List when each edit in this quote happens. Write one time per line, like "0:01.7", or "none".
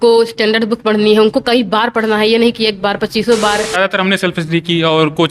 0:03.7